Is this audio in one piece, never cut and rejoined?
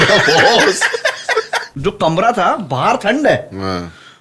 no; 1 cut; at 1.6 s

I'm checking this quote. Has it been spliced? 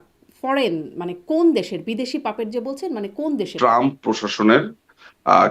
yes; 1 cut; at 3.5 s

